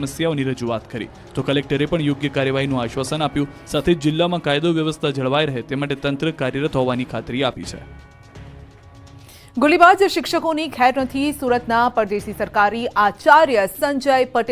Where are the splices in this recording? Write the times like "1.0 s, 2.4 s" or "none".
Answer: 3.2 s

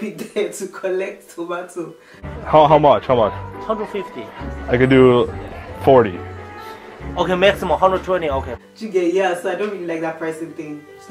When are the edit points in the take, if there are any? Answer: none

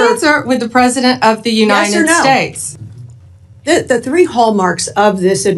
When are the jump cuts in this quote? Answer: 2.6 s

